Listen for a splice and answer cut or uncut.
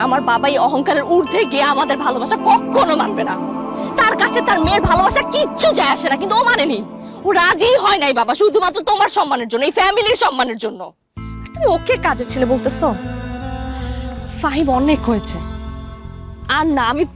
uncut